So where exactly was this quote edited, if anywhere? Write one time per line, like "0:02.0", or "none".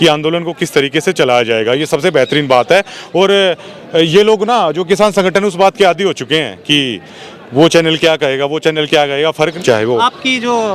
0:09.6